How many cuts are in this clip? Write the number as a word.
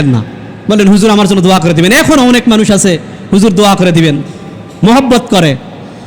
zero